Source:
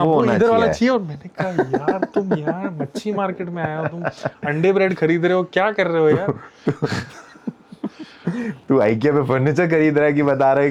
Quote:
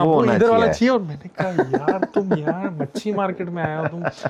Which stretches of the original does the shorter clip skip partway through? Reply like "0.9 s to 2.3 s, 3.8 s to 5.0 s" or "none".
none